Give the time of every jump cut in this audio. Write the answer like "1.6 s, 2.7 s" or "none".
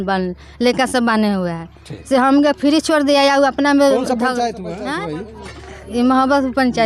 4.8 s